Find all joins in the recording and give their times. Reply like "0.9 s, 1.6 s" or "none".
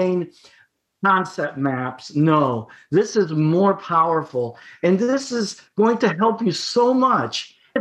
none